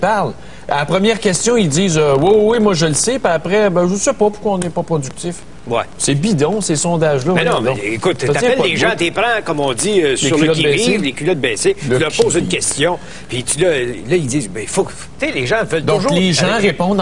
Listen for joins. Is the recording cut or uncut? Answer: cut